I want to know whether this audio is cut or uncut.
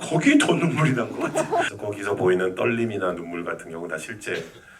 cut